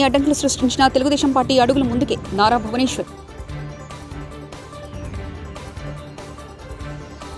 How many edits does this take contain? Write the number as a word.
zero